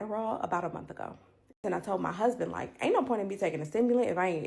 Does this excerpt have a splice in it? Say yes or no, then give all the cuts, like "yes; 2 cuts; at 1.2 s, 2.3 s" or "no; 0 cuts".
yes; 1 cut; at 1.6 s